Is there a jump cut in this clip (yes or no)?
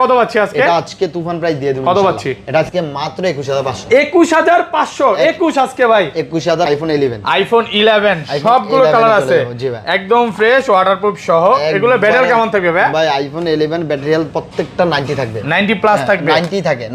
yes